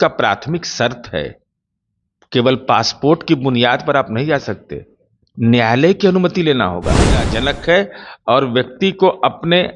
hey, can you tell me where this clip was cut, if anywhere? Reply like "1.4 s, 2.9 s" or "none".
7.3 s

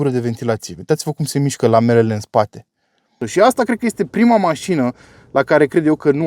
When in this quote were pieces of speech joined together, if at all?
3.3 s

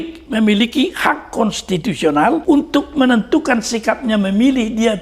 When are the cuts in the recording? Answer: 2.4 s

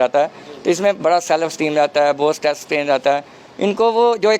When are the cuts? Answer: none

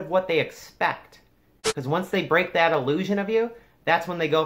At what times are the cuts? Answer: 1.6 s

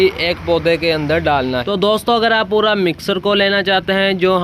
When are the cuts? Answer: 1.6 s

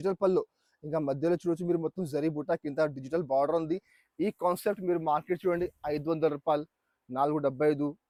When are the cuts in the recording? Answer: none

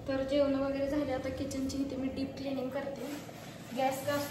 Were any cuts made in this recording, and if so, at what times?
none

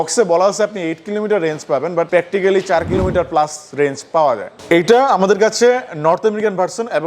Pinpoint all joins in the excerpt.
2.1 s, 4.5 s

